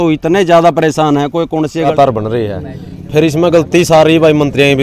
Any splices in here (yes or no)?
yes